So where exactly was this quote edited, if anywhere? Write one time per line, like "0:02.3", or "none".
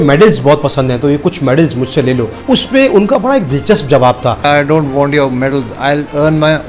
0:02.4
0:04.4